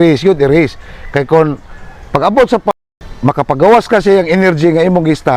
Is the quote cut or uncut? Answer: uncut